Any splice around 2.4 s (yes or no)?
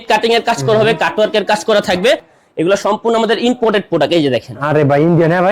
yes